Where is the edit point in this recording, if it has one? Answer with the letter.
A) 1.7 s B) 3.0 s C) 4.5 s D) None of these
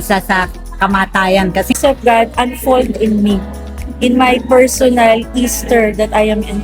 A